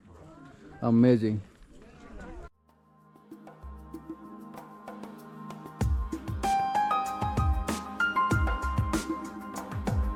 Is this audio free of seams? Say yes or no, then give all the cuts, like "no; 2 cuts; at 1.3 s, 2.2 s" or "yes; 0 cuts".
yes; 0 cuts